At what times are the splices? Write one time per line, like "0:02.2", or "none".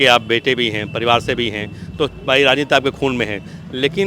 none